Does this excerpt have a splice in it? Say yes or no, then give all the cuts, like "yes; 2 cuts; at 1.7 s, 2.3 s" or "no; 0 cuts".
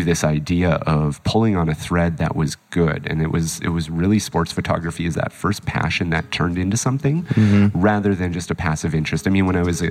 no; 0 cuts